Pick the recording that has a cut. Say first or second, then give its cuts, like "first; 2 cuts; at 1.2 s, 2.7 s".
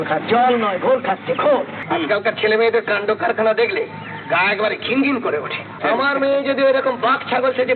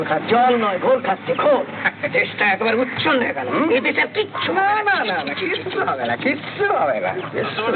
first; 2 cuts; at 1.8 s, 5.8 s